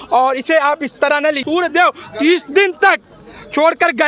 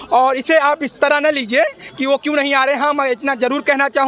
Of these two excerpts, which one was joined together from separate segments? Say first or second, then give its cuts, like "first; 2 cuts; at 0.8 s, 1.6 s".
first; 1 cut; at 1.4 s